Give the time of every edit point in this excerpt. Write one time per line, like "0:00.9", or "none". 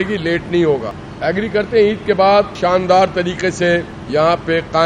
0:01.0
0:02.5
0:04.0